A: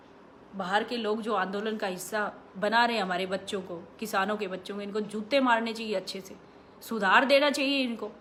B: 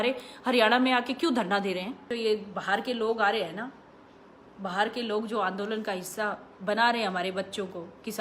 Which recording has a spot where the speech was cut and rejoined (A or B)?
B